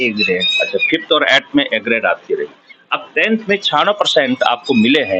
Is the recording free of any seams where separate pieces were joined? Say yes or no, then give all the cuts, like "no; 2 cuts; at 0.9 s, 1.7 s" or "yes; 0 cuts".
yes; 0 cuts